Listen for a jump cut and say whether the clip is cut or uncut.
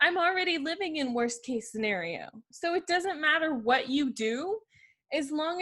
cut